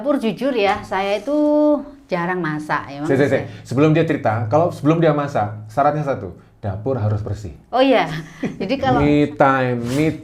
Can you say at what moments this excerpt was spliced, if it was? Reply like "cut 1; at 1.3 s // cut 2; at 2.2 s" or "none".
cut 1; at 8.9 s